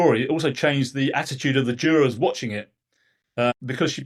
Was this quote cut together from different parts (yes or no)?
no